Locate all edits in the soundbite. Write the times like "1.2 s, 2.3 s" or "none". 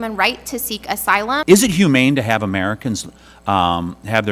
1.4 s